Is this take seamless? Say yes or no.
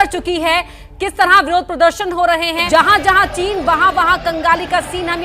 no